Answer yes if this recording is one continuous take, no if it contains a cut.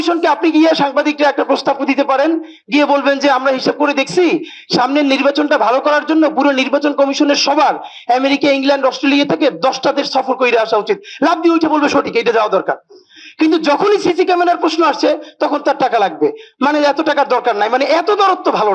yes